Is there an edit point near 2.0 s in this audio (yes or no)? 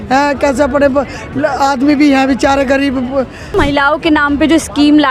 no